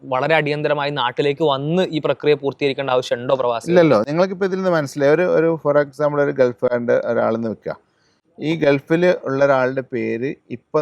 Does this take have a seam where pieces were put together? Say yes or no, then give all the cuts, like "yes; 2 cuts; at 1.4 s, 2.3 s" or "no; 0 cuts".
no; 0 cuts